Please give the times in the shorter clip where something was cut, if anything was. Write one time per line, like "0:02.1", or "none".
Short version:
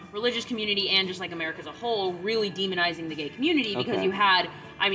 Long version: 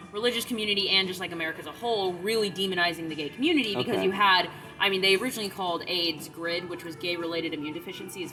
none